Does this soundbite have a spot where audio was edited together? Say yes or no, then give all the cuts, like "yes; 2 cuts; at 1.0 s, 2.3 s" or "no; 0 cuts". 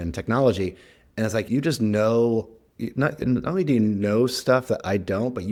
no; 0 cuts